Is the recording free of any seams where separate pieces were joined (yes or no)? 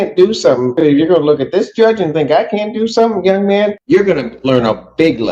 no